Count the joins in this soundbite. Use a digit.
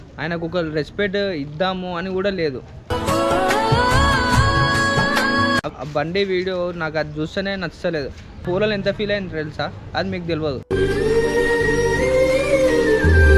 1